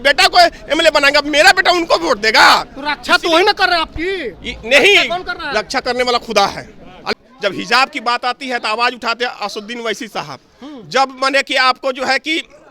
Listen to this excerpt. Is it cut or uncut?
cut